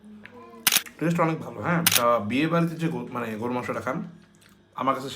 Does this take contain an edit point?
yes; 2 cuts; at 0.9 s, 1.9 s

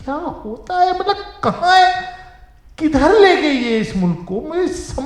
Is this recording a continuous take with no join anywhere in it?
yes; 0 cuts

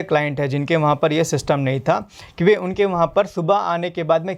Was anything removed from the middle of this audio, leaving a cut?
no; 0 cuts

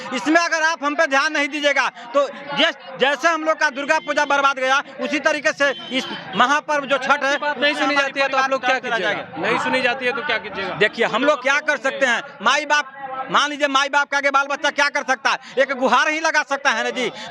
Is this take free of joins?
yes; 0 cuts

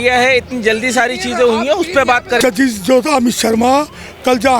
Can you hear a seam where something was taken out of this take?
yes; 1 cut; at 2.4 s

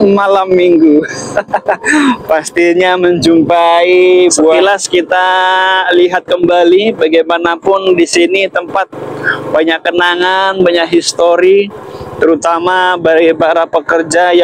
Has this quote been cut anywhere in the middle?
yes; 1 cut; at 4.6 s

